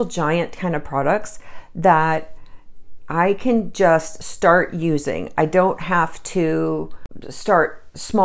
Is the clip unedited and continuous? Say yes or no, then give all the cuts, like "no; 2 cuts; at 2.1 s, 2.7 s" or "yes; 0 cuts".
yes; 0 cuts